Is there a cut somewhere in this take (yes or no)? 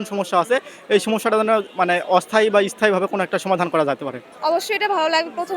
no